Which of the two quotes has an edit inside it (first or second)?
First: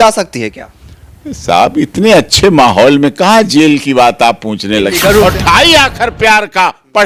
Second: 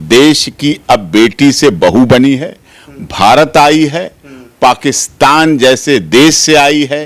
first